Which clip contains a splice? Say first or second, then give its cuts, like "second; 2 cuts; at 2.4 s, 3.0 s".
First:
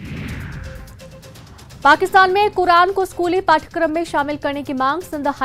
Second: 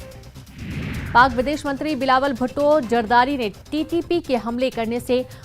second; 1 cut; at 1.0 s